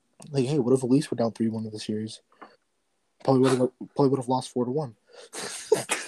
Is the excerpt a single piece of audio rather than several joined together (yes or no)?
yes